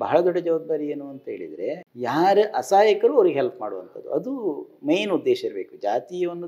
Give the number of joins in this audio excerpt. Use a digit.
1